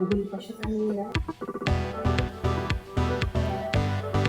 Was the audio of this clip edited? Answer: yes; 1 cut; at 1.1 s

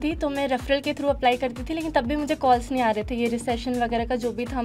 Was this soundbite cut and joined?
no; 0 cuts

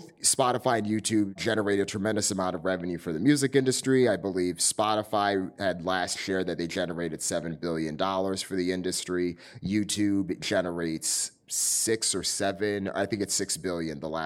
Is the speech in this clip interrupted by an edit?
yes; 1 cut; at 1.4 s

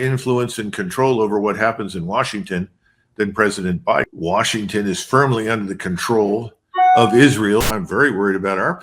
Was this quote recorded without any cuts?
no; 1 cut; at 7.7 s

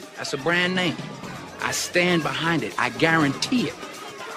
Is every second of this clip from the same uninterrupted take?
yes; 0 cuts

